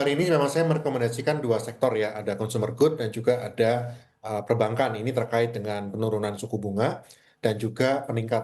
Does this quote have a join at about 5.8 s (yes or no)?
no